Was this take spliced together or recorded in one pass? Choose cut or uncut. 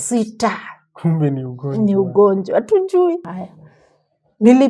cut